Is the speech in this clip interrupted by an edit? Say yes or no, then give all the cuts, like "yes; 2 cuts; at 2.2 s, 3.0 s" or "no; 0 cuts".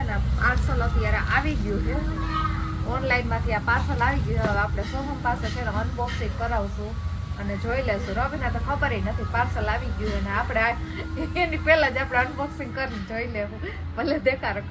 no; 0 cuts